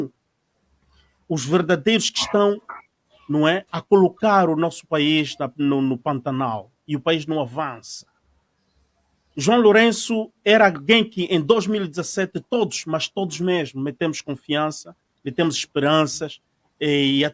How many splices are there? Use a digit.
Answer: 0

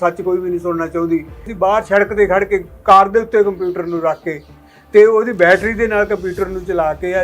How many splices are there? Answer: 1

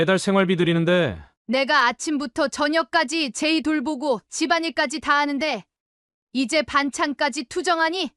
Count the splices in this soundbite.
1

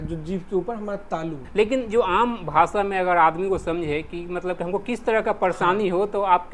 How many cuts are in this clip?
1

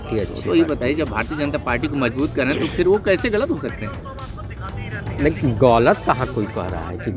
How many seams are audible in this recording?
0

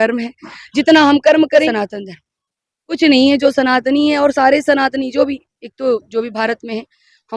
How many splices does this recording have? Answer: 1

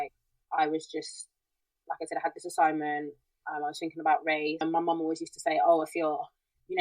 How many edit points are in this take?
1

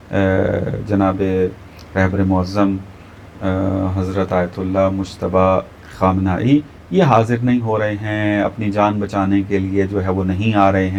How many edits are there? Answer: 0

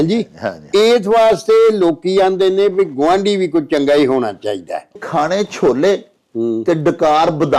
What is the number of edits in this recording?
1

